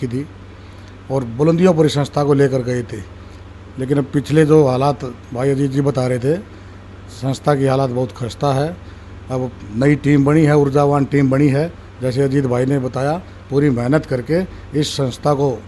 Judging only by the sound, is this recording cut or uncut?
uncut